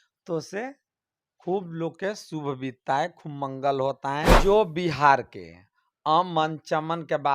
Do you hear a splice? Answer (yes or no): yes